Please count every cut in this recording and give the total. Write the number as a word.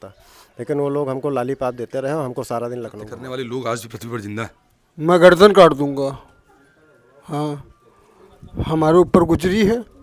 one